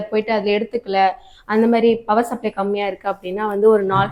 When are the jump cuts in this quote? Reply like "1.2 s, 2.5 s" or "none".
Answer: none